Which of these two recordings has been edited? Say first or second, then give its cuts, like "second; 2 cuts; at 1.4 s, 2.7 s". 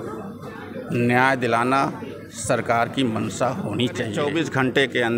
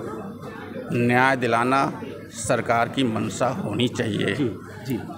first; 1 cut; at 4.2 s